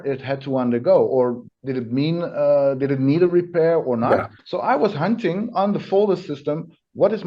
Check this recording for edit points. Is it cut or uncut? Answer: cut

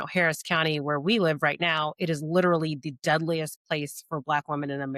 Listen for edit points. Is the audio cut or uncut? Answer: uncut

